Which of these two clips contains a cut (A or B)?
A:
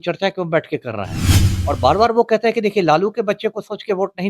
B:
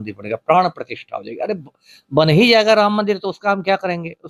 A